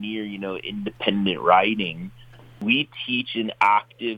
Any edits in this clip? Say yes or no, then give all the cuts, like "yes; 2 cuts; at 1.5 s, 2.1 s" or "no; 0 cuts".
yes; 1 cut; at 2.5 s